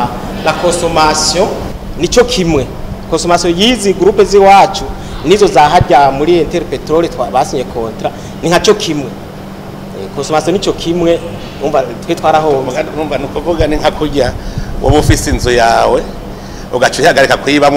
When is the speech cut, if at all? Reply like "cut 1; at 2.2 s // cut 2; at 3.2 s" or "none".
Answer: none